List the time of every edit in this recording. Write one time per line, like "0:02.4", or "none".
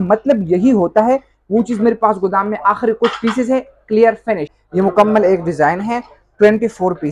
0:04.6